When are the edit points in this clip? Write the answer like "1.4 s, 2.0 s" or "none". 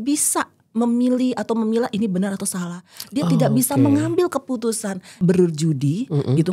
5.1 s